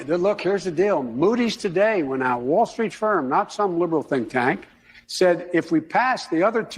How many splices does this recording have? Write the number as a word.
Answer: one